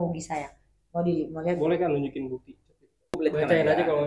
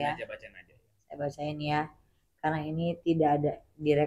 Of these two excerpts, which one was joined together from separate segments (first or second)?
first